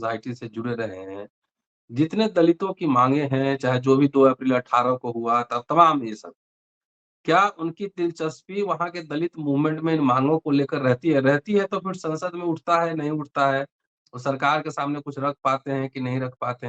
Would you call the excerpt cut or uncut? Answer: uncut